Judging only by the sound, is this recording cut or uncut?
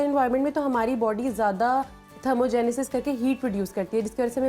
uncut